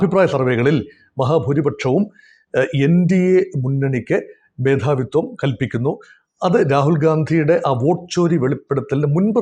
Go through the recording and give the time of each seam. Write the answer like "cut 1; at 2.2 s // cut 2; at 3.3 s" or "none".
none